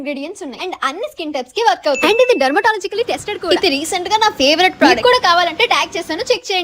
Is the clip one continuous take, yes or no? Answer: no